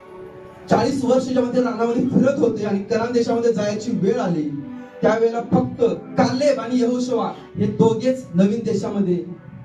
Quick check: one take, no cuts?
no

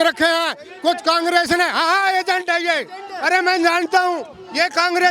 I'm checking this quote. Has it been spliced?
no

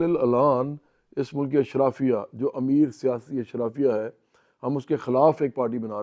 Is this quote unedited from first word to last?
yes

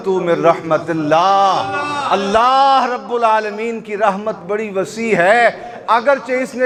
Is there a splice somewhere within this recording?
no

